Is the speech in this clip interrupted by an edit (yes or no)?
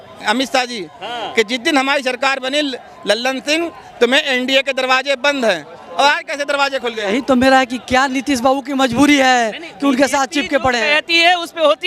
no